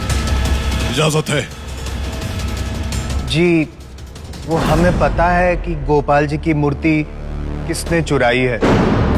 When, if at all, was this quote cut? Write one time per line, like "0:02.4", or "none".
none